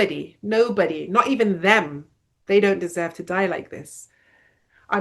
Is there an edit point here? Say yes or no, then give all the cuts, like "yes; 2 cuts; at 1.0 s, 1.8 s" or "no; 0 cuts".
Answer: no; 0 cuts